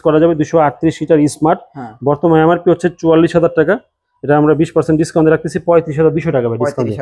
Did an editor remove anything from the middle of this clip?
no; 0 cuts

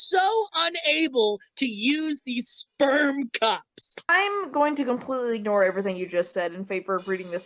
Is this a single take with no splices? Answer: no; 1 cut; at 4.1 s

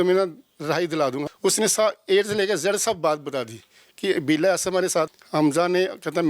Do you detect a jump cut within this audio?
yes; 2 cuts; at 1.3 s, 5.2 s

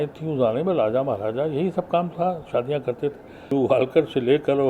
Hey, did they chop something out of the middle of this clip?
yes; 1 cut; at 3.5 s

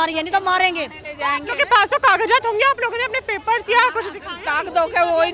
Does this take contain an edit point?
no; 0 cuts

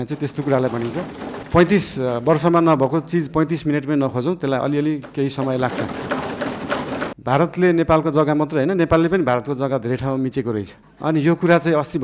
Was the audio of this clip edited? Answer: yes; 2 cuts; at 1.3 s, 7.1 s

